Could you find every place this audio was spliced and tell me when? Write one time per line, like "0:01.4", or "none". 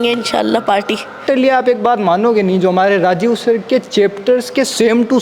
0:01.2